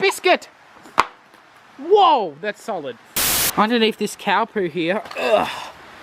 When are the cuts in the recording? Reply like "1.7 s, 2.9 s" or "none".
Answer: 3.0 s